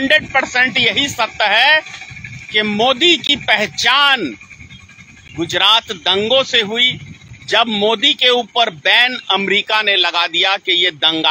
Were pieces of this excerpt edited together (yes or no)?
no